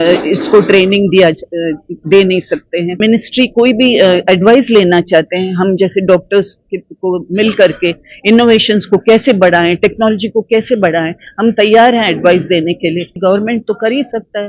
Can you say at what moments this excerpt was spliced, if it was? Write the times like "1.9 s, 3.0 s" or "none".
3.0 s, 13.1 s